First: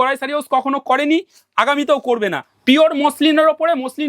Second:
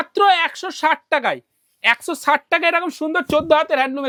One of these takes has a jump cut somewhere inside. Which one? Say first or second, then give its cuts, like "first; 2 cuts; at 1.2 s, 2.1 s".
first; 1 cut; at 2.5 s